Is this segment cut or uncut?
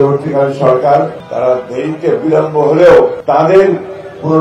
cut